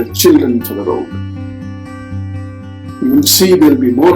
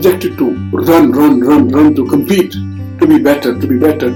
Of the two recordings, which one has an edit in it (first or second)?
first